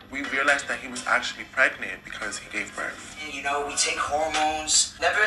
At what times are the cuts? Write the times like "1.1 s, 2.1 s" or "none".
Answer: 3.3 s